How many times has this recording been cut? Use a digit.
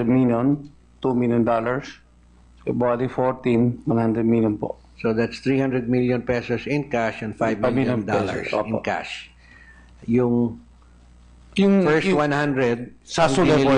0